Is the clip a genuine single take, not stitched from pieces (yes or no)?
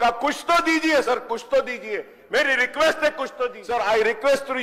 no